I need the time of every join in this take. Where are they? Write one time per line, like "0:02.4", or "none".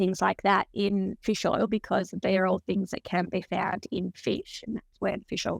none